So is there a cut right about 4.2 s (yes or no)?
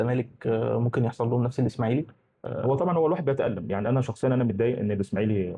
no